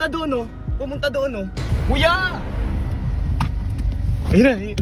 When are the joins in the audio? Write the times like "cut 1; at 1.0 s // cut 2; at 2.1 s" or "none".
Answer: cut 1; at 1.7 s